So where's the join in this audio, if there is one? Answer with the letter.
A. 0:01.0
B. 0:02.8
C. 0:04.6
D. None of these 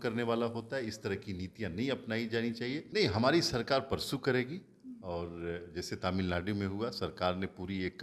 B